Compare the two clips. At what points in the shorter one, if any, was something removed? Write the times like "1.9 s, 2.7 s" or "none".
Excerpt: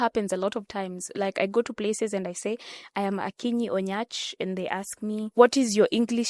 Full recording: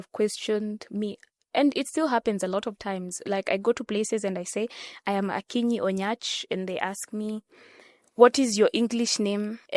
5.3 s